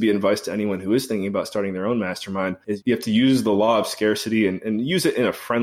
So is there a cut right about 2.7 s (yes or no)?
yes